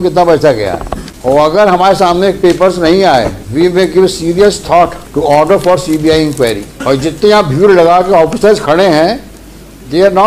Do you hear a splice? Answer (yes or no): yes